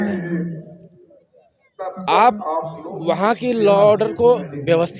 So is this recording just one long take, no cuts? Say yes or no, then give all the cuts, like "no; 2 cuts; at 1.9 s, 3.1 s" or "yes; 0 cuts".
yes; 0 cuts